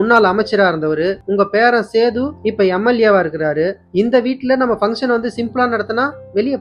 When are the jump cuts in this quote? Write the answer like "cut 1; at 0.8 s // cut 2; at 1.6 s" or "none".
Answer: cut 1; at 1.2 s // cut 2; at 2.4 s